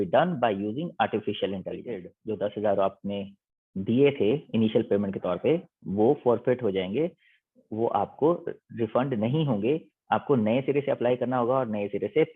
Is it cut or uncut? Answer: cut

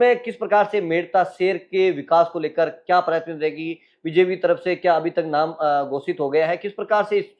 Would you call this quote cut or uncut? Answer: uncut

